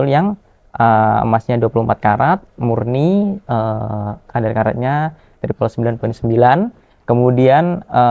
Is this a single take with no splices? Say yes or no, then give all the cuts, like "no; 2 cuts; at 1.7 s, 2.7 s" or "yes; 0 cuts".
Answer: yes; 0 cuts